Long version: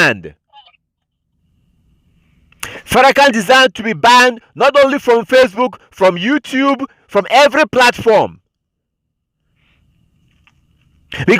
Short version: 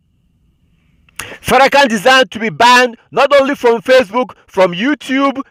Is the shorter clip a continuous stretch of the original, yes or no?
yes